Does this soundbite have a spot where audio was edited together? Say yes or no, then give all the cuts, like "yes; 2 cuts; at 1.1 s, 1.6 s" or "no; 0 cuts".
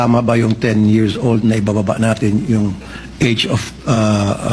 no; 0 cuts